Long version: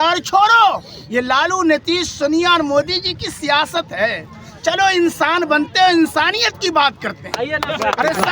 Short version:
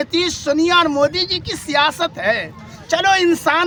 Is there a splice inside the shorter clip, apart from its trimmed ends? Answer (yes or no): no